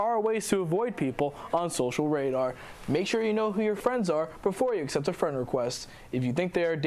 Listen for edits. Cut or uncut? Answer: uncut